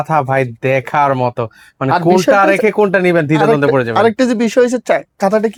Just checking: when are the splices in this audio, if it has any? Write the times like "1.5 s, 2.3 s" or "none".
none

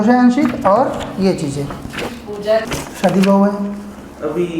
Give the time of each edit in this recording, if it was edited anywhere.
2.6 s

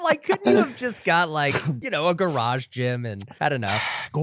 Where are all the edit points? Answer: 1.8 s, 3.2 s

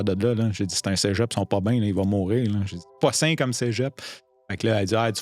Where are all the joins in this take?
2.9 s

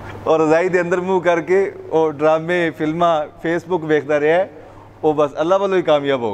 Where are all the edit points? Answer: none

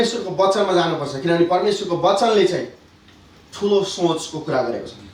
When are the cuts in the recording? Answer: none

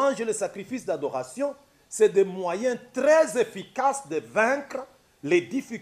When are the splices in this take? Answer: none

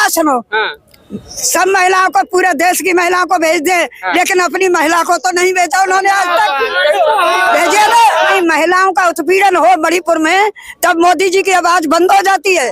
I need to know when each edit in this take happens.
8.3 s

